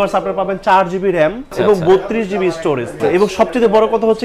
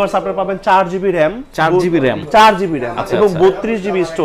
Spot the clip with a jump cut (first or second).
first